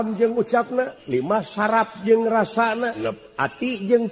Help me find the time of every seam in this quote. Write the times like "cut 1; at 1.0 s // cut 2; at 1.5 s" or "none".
cut 1; at 1.0 s // cut 2; at 3.0 s